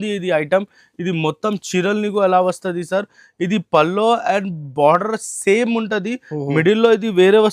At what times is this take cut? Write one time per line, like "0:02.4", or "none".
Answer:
none